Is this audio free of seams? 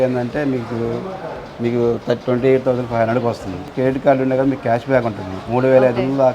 no; 1 cut; at 3.7 s

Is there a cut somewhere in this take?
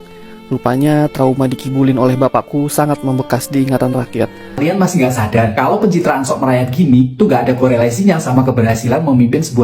yes; 1 cut; at 4.6 s

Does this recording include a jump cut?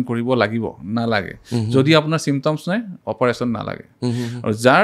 no; 0 cuts

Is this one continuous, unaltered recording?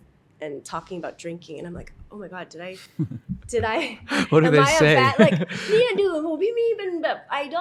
yes; 0 cuts

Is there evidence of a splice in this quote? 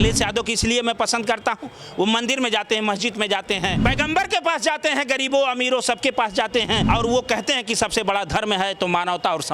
yes; 2 cuts; at 3.8 s, 6.8 s

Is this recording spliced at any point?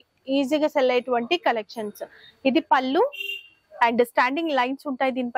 yes; 1 cut; at 3.6 s

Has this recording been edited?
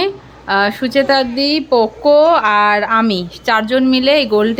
no; 0 cuts

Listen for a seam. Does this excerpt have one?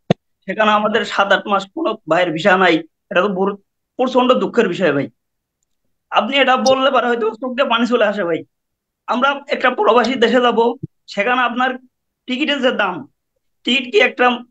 no; 0 cuts

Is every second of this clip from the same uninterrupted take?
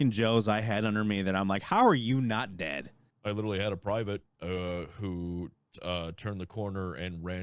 no; 1 cut; at 3.1 s

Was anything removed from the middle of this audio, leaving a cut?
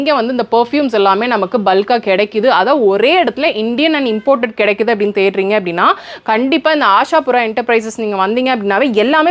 no; 0 cuts

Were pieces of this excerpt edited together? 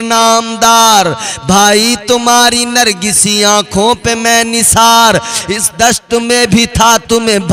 no; 0 cuts

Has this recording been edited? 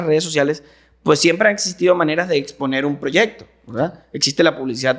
no; 0 cuts

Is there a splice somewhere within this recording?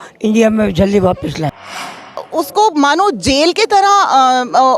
yes; 1 cut; at 2.1 s

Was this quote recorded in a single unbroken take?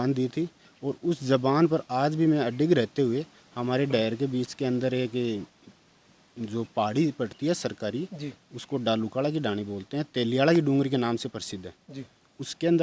yes; 0 cuts

